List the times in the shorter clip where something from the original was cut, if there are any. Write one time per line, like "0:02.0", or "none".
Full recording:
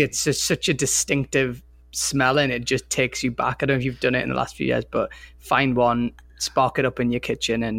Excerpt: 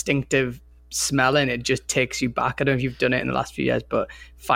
none